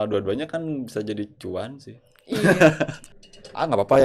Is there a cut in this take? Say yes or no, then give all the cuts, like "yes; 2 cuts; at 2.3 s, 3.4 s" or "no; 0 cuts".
yes; 1 cut; at 3.0 s